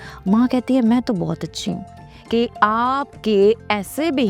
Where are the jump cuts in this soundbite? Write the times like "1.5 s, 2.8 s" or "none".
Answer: 2.1 s